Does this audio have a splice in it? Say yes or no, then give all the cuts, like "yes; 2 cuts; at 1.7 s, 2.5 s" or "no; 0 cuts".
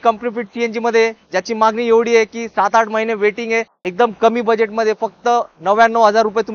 yes; 1 cut; at 3.8 s